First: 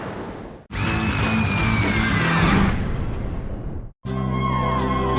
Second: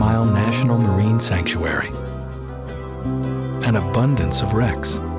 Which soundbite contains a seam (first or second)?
first